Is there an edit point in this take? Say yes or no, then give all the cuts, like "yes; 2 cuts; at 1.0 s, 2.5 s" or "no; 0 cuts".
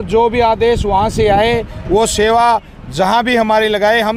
no; 0 cuts